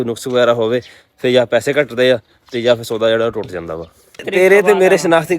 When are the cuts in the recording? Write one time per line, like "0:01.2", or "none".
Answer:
0:04.3